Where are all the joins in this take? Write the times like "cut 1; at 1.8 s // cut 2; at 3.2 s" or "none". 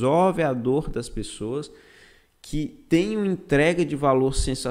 none